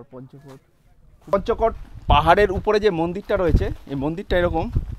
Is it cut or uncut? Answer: cut